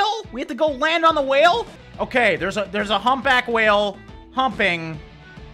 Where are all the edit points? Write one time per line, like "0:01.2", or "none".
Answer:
0:01.8